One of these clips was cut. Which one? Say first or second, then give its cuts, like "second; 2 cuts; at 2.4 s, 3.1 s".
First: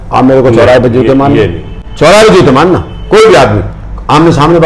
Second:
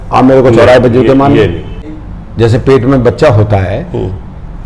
second; 1 cut; at 1.9 s